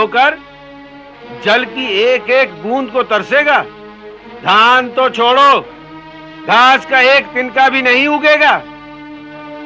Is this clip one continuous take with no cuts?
yes; 0 cuts

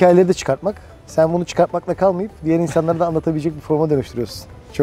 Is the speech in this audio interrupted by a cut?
no; 0 cuts

